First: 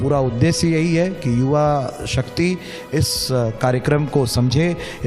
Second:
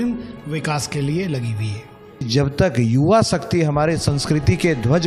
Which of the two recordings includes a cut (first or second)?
second